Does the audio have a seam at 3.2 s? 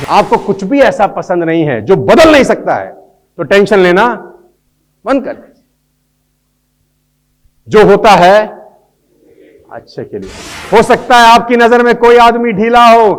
no; 1 cut; at 10.6 s

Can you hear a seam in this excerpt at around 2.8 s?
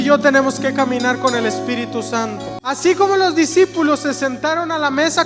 yes; 1 cut; at 2.8 s

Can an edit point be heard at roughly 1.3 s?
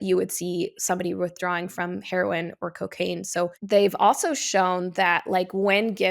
no; 1 cut; at 3.5 s

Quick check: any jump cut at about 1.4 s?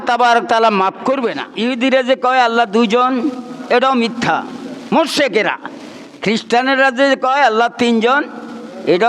yes; 1 cut; at 1.4 s

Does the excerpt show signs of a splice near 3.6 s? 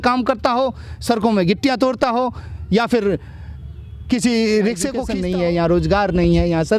no; 1 cut; at 5.1 s

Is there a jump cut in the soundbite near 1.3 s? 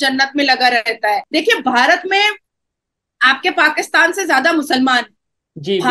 yes; 1 cut; at 1.3 s

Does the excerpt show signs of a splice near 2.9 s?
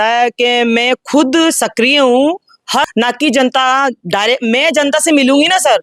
yes; 1 cut; at 2.9 s

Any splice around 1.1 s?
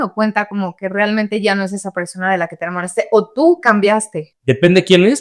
no; 1 cut; at 4.3 s

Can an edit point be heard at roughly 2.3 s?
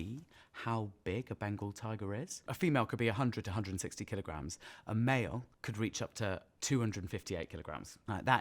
no; 0 cuts

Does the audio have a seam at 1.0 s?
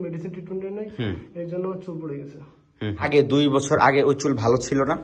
no; 1 cut; at 3.0 s

